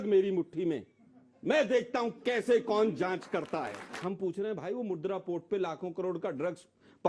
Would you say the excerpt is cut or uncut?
cut